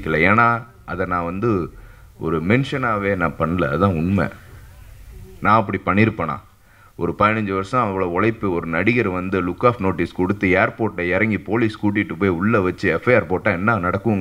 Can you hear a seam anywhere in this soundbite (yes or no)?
no